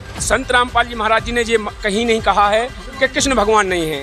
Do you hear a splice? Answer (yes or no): no